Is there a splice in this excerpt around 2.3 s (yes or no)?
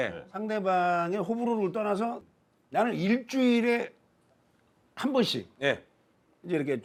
no